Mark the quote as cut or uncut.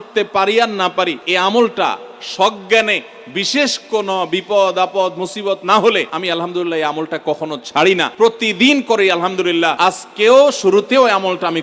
cut